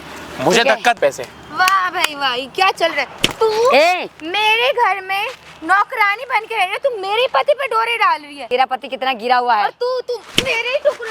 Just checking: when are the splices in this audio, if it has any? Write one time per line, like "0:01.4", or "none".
0:01.0
0:08.3